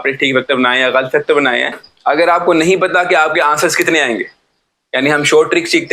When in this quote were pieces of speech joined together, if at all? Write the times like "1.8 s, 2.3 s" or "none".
1.9 s